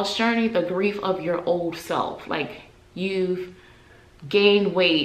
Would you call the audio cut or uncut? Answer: uncut